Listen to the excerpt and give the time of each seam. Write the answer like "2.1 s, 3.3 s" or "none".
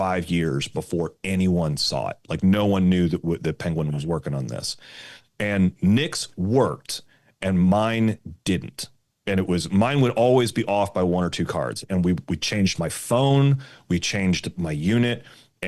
none